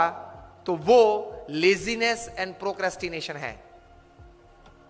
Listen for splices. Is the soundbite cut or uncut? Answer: uncut